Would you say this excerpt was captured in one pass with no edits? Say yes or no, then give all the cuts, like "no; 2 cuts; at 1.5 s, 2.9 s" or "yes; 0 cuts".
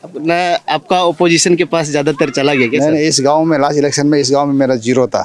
yes; 0 cuts